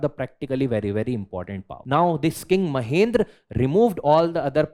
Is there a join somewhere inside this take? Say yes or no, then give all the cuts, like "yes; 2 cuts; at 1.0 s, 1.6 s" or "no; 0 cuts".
yes; 1 cut; at 1.8 s